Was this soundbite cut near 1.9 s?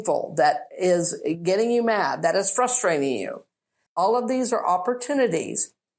no; 1 cut; at 3.8 s

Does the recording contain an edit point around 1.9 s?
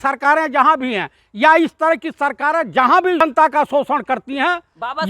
no; 1 cut; at 3.2 s

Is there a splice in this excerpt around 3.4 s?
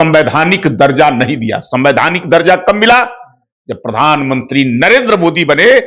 no; 0 cuts

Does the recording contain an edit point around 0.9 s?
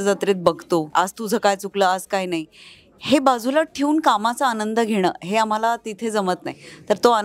yes; 1 cut; at 0.9 s

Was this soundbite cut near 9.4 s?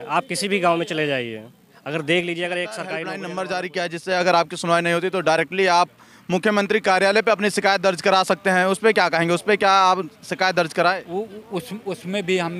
no; 1 cut; at 3.0 s

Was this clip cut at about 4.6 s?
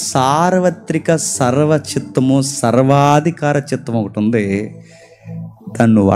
no; 0 cuts

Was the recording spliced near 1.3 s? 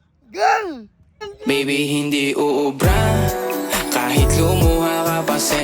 yes; 1 cut; at 1.3 s

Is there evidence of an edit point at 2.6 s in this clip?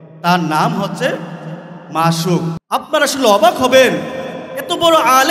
yes; 1 cut; at 2.6 s

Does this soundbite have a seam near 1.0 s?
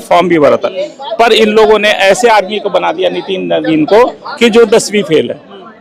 no; 0 cuts

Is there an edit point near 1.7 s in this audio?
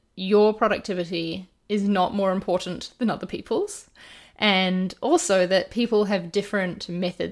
no; 0 cuts

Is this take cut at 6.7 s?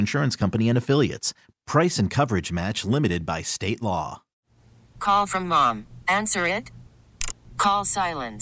no; 1 cut; at 4.3 s

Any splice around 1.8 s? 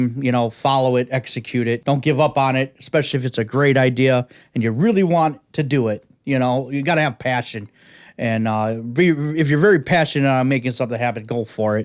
yes; 1 cut; at 1.8 s

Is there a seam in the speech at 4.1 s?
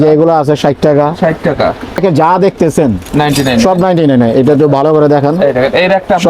no; 1 cut; at 2.0 s

